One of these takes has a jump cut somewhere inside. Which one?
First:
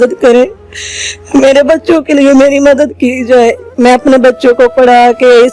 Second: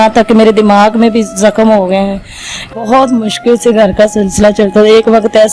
second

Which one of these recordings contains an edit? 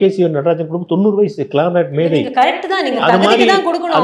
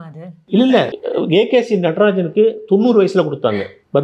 second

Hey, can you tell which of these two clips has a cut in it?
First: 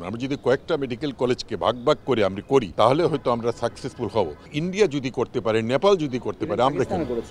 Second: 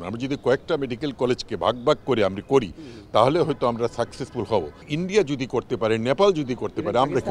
first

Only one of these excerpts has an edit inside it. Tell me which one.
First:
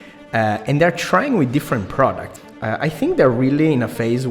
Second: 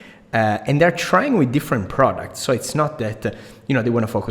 first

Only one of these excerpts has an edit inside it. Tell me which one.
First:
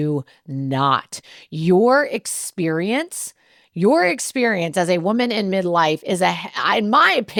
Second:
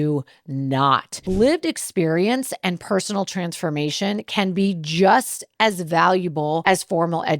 second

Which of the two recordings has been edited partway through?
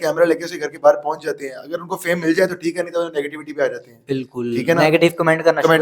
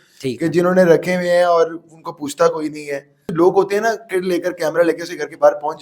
second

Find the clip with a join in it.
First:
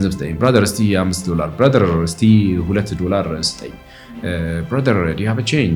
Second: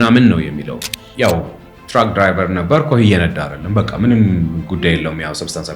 second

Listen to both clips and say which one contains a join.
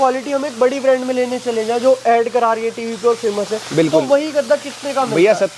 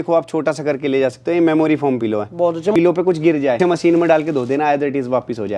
second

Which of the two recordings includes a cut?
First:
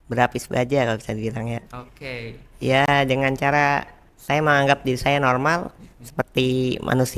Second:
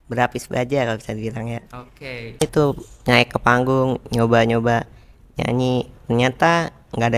second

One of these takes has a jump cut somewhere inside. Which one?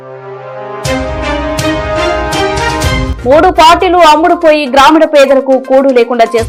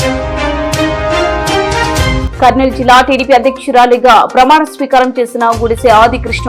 second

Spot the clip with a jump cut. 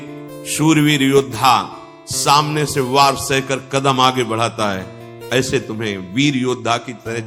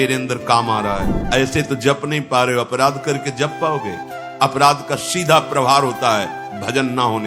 second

